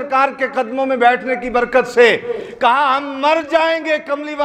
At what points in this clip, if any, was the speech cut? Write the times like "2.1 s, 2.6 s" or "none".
none

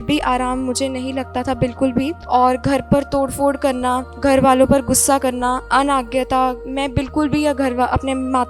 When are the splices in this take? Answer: 2.2 s, 4.1 s, 5.6 s, 6.6 s

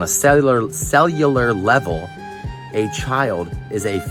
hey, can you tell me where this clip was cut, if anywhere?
none

